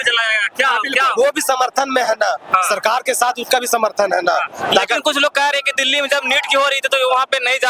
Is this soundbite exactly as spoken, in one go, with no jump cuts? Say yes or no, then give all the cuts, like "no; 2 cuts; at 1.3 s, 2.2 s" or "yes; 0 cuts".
yes; 0 cuts